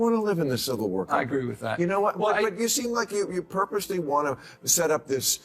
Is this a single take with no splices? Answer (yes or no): yes